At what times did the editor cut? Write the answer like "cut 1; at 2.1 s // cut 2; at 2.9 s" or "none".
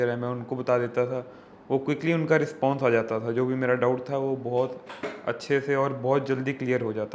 none